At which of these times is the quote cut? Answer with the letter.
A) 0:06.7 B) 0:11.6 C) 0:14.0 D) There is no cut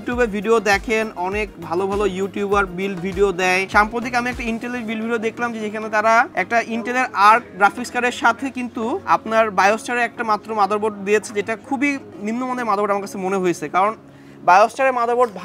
D